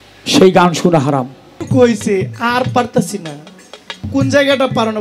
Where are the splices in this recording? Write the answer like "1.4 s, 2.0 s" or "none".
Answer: 1.5 s

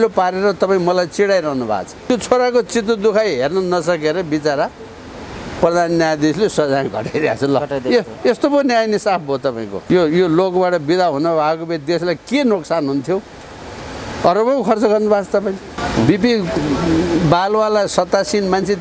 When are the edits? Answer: 1.9 s, 9.7 s, 15.7 s

